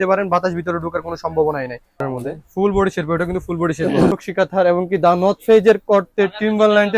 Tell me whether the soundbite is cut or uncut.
cut